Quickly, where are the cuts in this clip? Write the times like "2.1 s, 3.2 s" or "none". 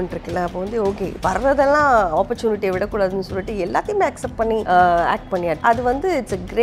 4.6 s, 5.6 s